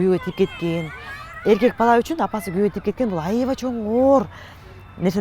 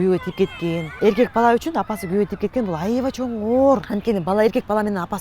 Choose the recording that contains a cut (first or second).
second